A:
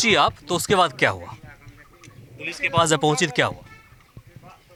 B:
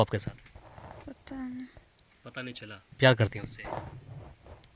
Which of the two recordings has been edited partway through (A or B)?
B